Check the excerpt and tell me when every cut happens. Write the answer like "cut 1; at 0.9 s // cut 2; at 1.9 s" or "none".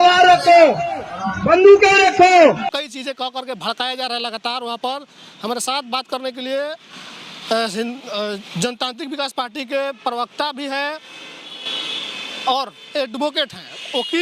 none